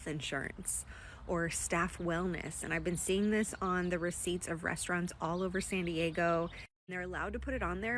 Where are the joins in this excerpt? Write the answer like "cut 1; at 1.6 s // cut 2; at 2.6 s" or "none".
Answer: none